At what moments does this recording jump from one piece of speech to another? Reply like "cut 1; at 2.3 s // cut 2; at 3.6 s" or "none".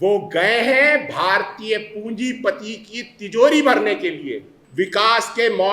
cut 1; at 4.5 s